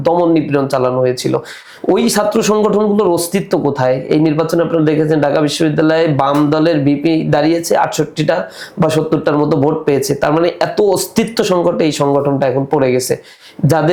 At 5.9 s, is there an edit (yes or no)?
no